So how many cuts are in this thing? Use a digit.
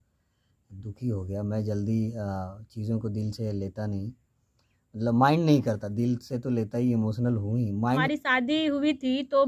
1